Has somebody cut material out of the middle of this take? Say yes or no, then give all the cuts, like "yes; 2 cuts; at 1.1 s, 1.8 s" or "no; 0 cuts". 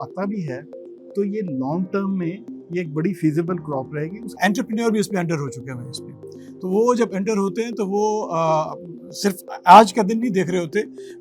yes; 1 cut; at 4.3 s